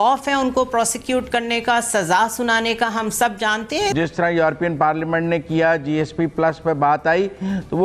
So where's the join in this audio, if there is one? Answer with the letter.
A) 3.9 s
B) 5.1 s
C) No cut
A